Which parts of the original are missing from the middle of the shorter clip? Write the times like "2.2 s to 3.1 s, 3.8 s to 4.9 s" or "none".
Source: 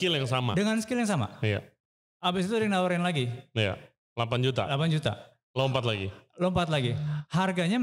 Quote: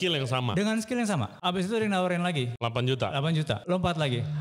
1.3 s to 2.1 s, 3.3 s to 4.1 s, 5.2 s to 6.3 s